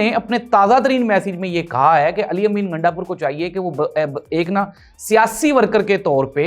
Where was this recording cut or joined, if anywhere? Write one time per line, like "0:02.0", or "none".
none